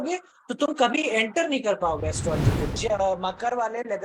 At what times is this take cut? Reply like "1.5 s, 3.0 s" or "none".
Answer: 2.7 s